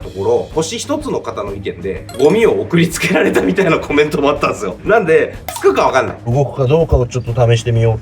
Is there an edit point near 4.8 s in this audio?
yes; 3 cuts; at 1.9 s, 4.8 s, 6.3 s

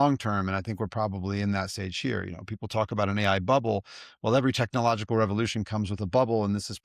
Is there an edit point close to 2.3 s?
no; 0 cuts

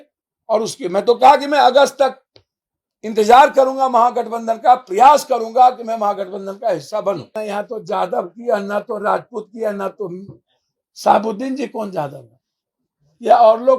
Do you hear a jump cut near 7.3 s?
yes; 1 cut; at 7.3 s

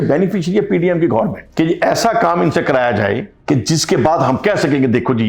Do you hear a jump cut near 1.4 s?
yes; 2 cuts; at 1.4 s, 3.3 s

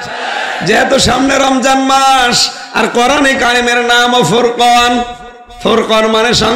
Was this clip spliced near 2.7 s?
no; 0 cuts

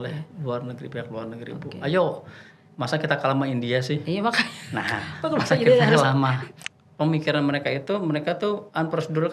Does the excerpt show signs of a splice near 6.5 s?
yes; 1 cut; at 6.5 s

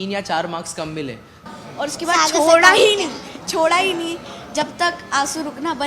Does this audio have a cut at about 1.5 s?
yes; 1 cut; at 1.5 s

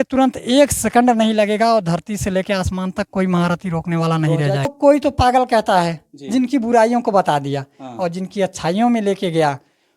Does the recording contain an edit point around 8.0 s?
no; 1 cut; at 4.7 s

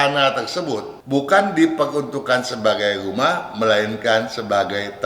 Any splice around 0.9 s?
yes; 1 cut; at 0.9 s

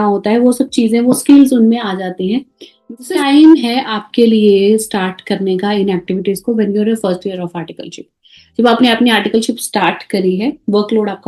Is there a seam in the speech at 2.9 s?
yes; 1 cut; at 2.9 s

